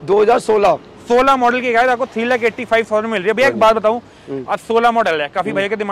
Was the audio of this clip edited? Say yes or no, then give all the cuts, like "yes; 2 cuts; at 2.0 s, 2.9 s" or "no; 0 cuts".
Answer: no; 0 cuts